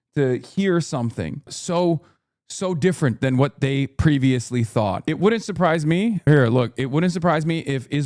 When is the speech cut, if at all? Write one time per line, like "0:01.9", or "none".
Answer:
0:01.6
0:05.0
0:06.3